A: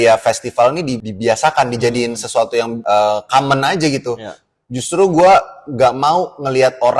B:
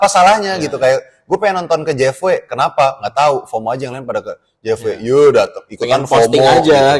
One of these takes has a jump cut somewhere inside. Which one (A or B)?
A